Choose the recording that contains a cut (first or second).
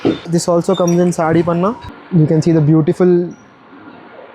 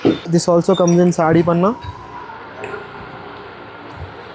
first